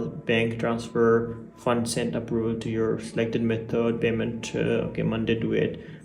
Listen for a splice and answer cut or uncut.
uncut